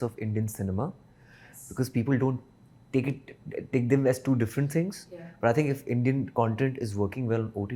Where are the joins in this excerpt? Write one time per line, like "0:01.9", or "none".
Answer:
none